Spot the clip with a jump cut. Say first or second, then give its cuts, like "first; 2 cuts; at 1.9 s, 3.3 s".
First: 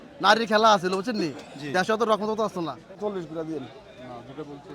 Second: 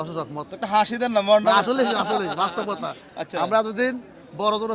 first; 1 cut; at 2.9 s